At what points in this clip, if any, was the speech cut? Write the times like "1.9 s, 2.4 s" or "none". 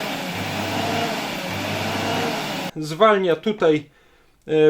2.7 s